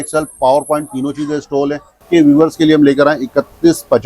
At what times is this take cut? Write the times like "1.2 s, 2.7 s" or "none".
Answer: 2.0 s